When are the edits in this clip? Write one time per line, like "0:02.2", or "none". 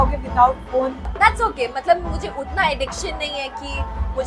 0:01.1